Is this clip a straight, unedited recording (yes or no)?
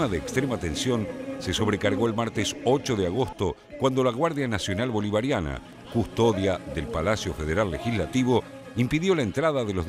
yes